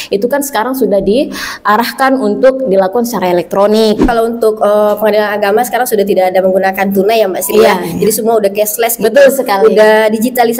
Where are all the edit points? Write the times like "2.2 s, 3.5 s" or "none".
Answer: 4.0 s